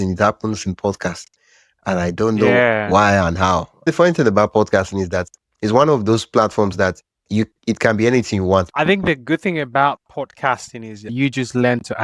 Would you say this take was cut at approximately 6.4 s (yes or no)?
no